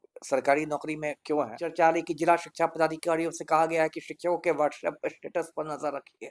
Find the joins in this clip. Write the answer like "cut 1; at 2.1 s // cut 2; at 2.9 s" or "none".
cut 1; at 1.6 s